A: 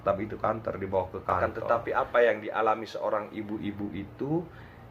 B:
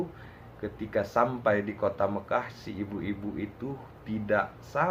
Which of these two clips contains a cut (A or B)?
A